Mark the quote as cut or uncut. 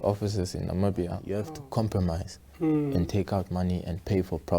cut